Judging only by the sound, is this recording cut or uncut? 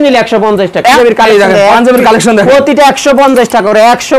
cut